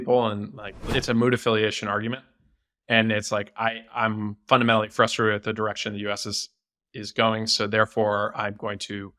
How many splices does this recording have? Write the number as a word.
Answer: one